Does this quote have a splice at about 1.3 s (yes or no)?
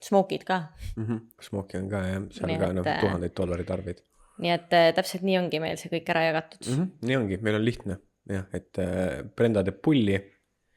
no